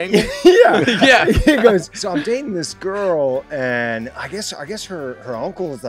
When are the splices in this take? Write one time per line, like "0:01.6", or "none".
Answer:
0:02.0

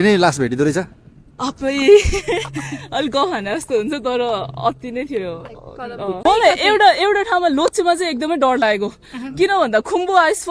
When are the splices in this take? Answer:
0:06.2

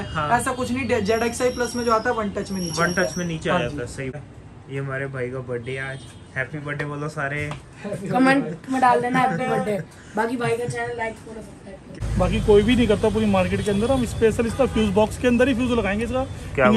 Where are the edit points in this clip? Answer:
0:04.2
0:11.9

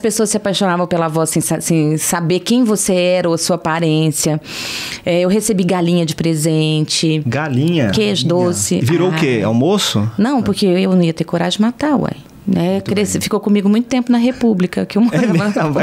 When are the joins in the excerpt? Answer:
0:12.3

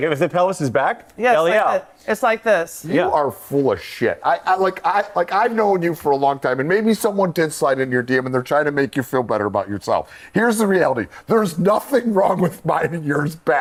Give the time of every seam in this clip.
none

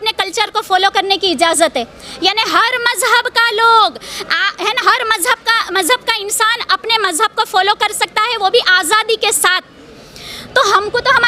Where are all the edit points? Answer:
none

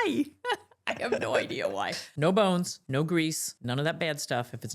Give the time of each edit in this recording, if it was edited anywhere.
0:02.1
0:02.8
0:03.5

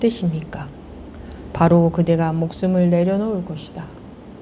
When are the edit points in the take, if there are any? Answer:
none

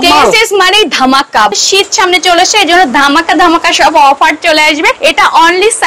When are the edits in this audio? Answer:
0:01.5
0:05.0

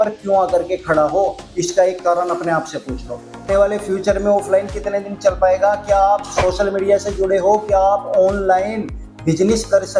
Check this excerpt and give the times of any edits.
0:03.4

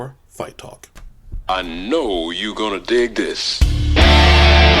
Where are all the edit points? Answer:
0:01.0

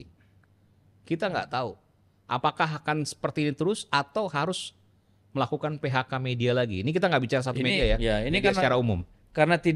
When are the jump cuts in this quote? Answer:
none

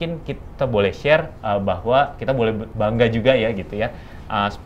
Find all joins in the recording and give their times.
0:02.7

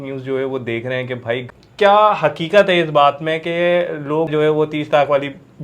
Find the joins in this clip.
0:01.4
0:04.3

